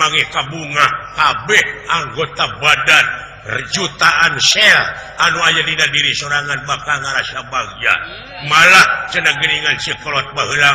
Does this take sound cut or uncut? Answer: uncut